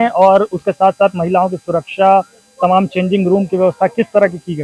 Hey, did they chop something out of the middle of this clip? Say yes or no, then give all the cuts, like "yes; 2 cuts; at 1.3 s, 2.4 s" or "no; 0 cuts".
no; 0 cuts